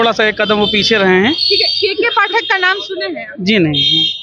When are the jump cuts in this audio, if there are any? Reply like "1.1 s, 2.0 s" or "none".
none